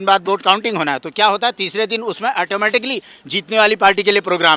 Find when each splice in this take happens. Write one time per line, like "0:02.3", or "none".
none